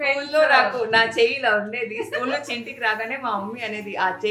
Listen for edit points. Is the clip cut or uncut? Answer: uncut